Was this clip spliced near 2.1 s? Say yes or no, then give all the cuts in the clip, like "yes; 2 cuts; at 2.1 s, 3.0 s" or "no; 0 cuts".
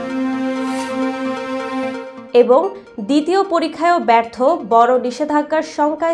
yes; 1 cut; at 2.1 s